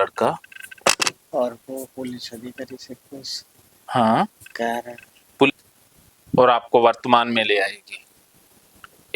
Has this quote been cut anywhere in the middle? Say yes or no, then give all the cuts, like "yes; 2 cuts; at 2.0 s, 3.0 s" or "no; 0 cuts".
yes; 1 cut; at 5.5 s